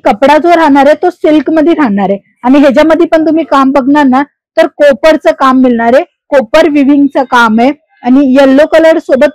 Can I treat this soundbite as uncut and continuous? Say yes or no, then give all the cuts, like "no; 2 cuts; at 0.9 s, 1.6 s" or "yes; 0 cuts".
yes; 0 cuts